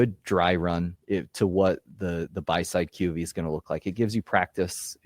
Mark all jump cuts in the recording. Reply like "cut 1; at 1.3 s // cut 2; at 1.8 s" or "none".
cut 1; at 0.9 s